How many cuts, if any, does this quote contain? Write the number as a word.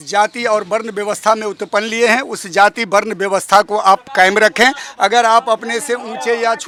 zero